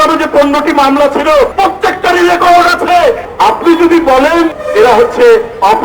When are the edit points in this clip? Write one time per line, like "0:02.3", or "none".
0:01.5
0:03.3
0:04.5